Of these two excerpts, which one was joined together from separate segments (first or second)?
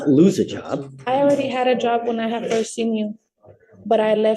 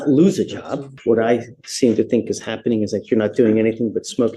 second